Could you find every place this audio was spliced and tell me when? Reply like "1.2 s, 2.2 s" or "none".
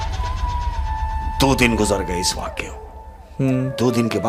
none